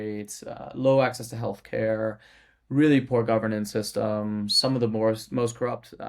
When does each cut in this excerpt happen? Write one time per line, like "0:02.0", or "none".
none